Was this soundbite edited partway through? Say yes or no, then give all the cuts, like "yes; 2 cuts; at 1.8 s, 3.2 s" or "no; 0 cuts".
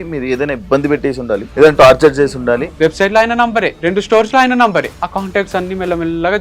yes; 4 cuts; at 1.5 s, 2.7 s, 3.7 s, 5.0 s